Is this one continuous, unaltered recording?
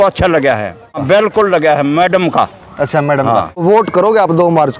no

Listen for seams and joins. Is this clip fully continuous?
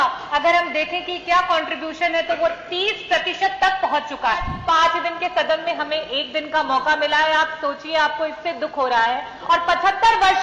no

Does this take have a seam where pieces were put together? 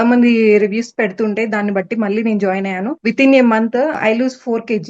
yes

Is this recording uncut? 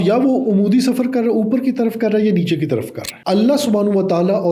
no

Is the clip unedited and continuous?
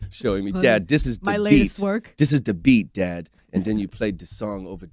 no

